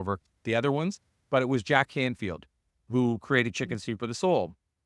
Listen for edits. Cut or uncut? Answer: uncut